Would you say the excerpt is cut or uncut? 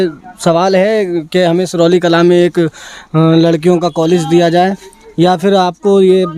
uncut